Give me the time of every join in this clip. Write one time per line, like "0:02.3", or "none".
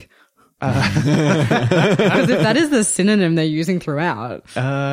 none